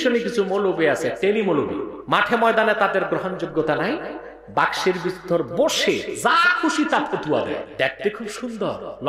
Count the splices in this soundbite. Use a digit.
2